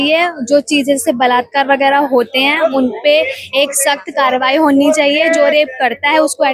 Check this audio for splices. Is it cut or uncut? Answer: uncut